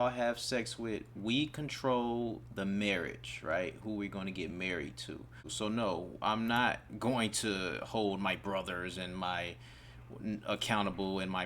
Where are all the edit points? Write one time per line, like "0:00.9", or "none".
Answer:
0:05.5